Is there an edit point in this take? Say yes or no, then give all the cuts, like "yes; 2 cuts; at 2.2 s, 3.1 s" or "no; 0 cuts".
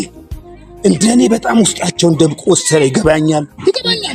no; 0 cuts